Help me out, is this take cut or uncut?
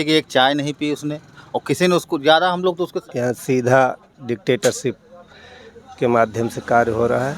cut